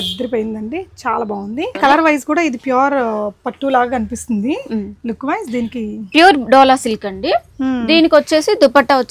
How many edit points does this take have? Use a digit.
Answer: 1